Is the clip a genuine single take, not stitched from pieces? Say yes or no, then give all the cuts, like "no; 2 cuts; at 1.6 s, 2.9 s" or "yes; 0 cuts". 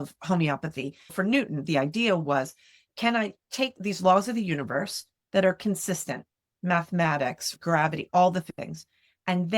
no; 3 cuts; at 1.1 s, 3.8 s, 7.9 s